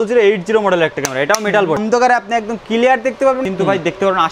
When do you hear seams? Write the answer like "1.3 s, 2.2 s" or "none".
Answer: 1.8 s, 3.4 s